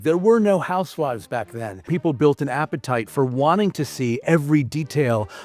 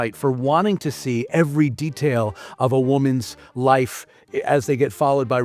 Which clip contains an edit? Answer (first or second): first